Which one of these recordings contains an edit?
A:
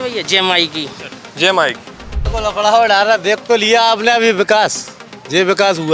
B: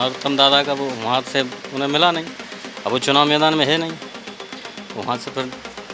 A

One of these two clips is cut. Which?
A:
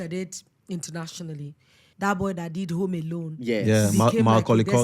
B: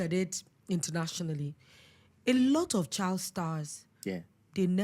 A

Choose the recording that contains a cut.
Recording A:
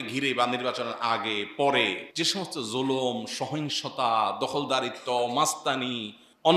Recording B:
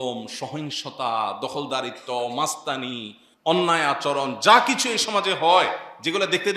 A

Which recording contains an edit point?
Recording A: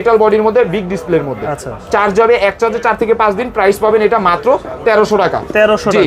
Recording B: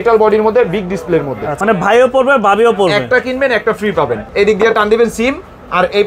B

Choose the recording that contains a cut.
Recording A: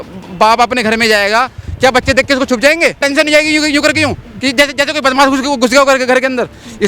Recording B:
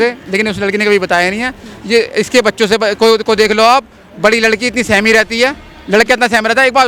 A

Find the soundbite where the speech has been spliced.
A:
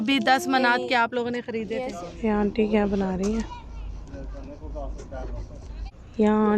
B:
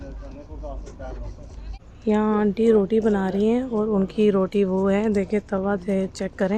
A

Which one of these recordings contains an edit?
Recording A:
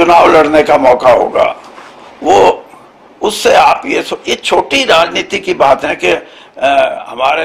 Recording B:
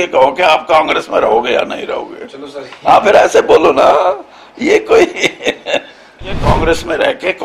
B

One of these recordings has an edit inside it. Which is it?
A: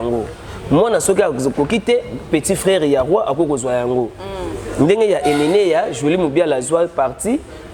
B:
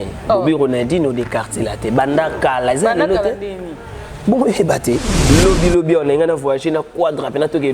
B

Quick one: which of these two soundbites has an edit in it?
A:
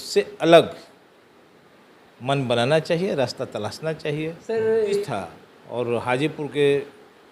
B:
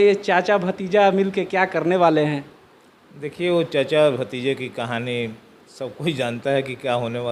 A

